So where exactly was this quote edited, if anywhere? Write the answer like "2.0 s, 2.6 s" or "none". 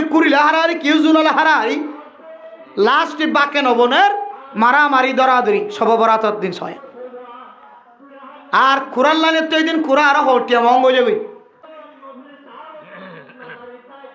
11.7 s